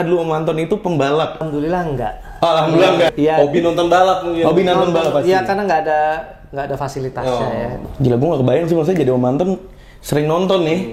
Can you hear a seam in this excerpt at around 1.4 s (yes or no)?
yes